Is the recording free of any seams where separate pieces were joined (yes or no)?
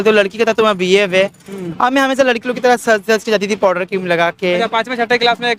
yes